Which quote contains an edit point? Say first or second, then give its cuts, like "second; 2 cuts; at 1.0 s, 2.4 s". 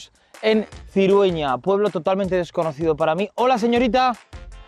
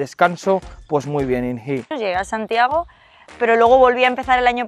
second; 1 cut; at 1.9 s